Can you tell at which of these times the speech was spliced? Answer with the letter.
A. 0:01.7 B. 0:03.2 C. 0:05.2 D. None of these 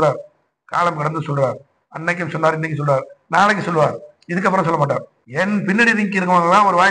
C